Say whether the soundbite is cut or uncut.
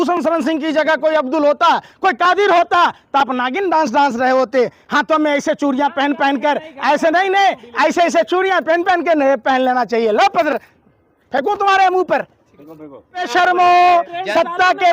cut